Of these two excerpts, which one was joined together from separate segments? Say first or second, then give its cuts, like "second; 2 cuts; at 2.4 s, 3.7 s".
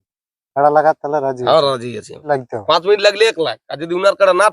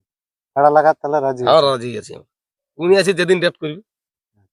first; 1 cut; at 2.2 s